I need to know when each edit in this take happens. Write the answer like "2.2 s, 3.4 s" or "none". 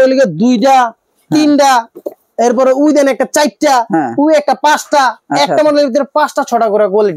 none

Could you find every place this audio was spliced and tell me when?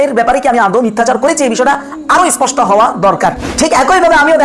3.5 s

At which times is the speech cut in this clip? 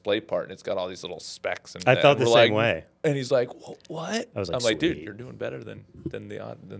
none

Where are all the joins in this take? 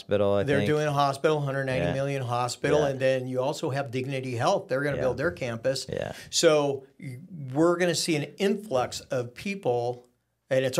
none

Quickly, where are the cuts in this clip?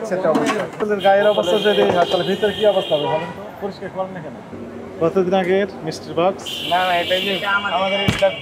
0.8 s, 4.5 s

